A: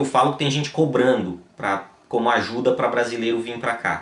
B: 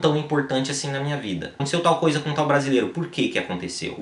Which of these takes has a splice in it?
B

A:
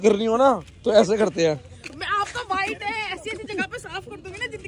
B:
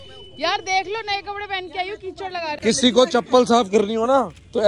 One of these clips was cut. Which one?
B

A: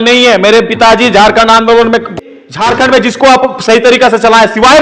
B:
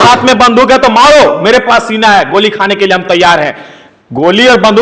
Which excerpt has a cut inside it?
A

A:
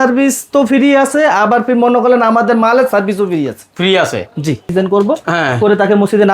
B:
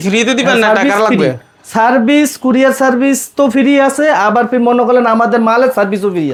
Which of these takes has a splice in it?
A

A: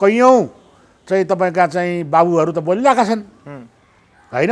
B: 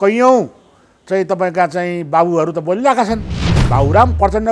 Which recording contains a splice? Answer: B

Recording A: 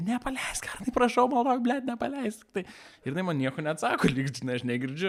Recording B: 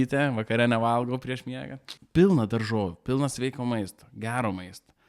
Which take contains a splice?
B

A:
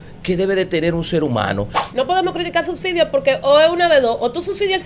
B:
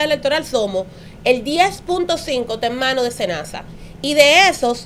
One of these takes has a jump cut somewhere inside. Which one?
A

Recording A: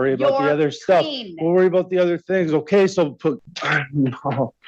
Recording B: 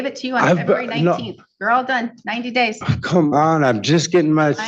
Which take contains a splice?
A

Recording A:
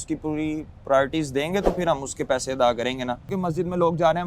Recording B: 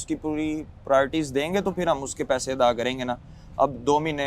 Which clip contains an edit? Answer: A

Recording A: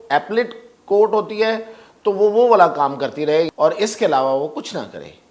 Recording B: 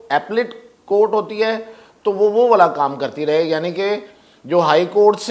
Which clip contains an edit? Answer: A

